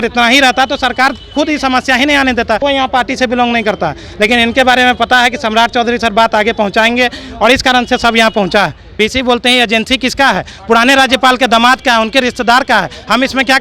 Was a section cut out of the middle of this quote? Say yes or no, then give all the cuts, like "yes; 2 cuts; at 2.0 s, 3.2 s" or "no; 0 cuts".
yes; 2 cuts; at 2.6 s, 9.0 s